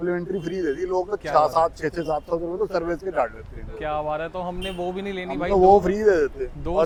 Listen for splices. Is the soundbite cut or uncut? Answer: uncut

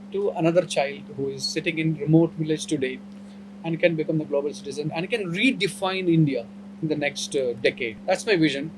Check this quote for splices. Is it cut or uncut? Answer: cut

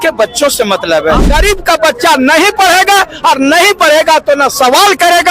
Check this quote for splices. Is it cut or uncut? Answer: cut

